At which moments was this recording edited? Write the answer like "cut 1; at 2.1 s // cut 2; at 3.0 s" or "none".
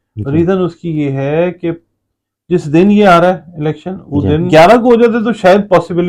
cut 1; at 4.4 s

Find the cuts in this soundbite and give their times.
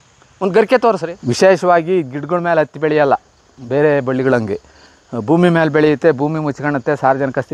cut 1; at 1.1 s

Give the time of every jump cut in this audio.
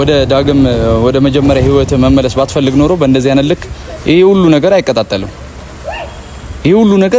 none

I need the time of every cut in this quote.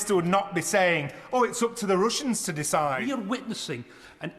cut 1; at 3.0 s

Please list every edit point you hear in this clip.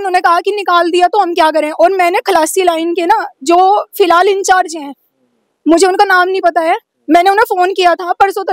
none

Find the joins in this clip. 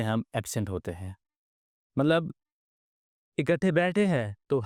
none

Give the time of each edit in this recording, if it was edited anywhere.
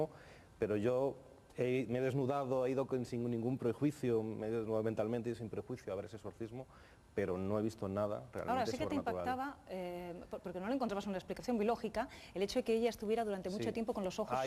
cut 1; at 9.4 s

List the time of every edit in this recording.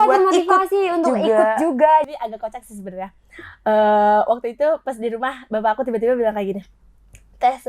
cut 1; at 2.1 s

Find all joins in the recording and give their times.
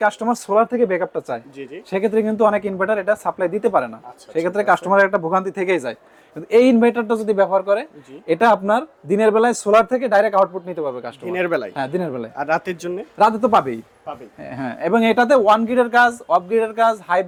none

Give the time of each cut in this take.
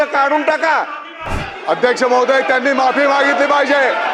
cut 1; at 1.3 s

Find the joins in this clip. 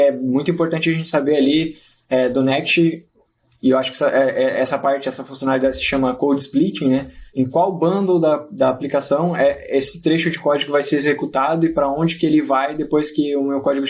none

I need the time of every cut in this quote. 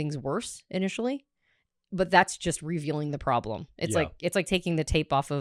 none

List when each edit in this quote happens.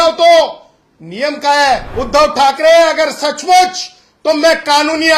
cut 1; at 1.9 s

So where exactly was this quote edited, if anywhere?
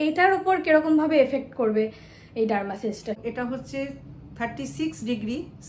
cut 1; at 3.2 s

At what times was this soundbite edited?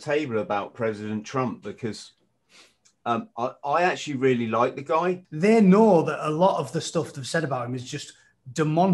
cut 1; at 5.3 s

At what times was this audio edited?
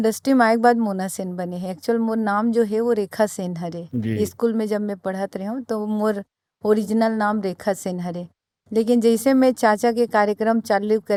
none

